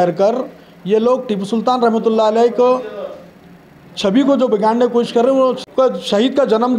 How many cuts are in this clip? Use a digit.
1